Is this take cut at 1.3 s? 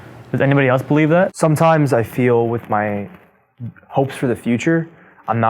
yes; 1 cut; at 1.3 s

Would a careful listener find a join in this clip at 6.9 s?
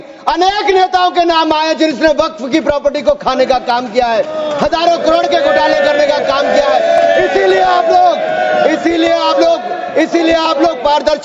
no; 0 cuts

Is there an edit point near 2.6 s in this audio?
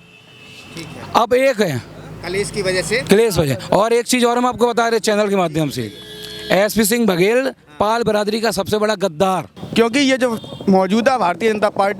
no; 1 cut; at 9.6 s

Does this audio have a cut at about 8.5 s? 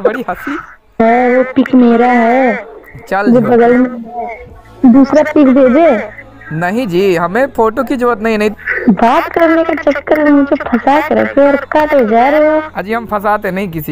yes; 2 cuts; at 1.0 s, 8.5 s

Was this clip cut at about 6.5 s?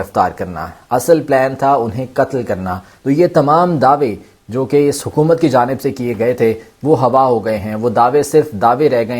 no; 1 cut; at 2.8 s

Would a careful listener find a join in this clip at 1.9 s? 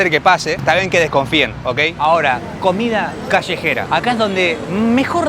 yes; 1 cut; at 1.9 s

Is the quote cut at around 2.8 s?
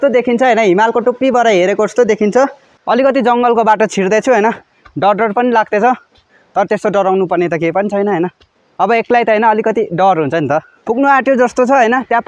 yes; 1 cut; at 2.8 s

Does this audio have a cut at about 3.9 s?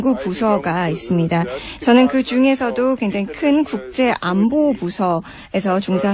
yes; 1 cut; at 3.9 s

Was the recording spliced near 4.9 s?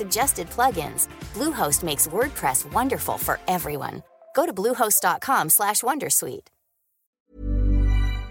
no; 1 cut; at 7.3 s

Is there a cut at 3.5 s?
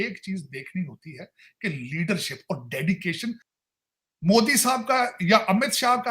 yes; 1 cut; at 3.5 s

